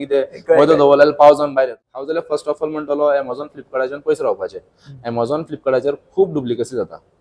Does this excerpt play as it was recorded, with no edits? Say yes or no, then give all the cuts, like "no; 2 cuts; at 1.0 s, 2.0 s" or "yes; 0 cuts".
no; 1 cut; at 1.4 s